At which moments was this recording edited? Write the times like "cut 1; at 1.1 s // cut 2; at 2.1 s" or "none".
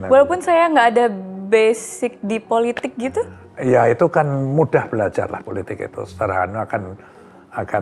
none